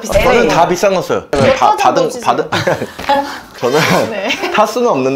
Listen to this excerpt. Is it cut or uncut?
cut